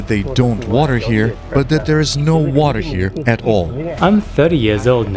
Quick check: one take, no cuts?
no; 2 cuts; at 1.4 s, 3.8 s

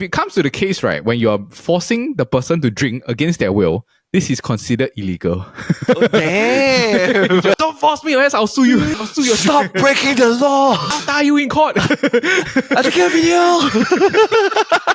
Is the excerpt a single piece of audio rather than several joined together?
no; 3 cuts; at 7.6 s, 8.9 s, 10.9 s

